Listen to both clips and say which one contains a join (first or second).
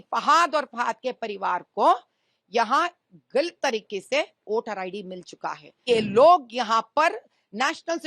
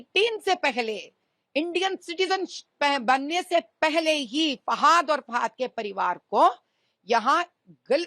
first